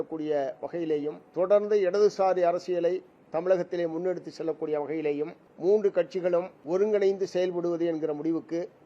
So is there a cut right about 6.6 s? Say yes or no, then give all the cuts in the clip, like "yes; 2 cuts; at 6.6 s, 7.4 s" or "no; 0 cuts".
yes; 3 cuts; at 1.2 s, 5.4 s, 6.6 s